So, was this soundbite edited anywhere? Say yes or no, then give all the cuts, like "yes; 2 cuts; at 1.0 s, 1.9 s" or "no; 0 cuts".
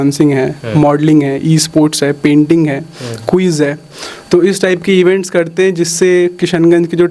no; 0 cuts